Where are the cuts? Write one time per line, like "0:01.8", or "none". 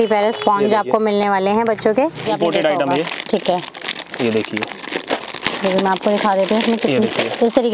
0:02.2
0:05.5